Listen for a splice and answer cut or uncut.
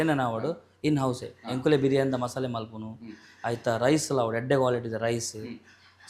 uncut